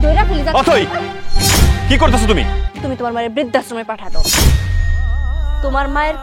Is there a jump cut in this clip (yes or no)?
yes